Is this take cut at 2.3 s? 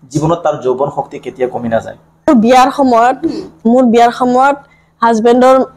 yes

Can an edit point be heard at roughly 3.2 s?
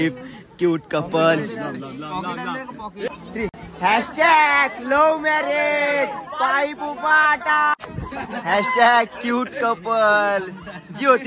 no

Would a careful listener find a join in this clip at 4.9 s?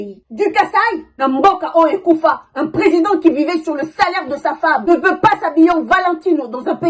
yes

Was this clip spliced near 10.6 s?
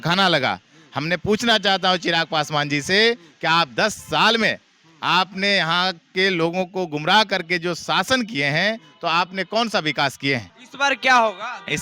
yes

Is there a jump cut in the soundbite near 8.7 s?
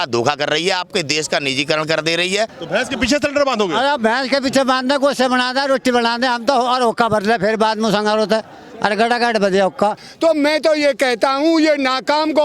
no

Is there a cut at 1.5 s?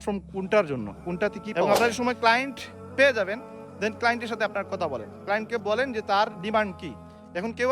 yes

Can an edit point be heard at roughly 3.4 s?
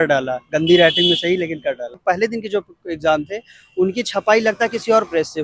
no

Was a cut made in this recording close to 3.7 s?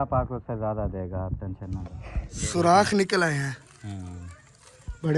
no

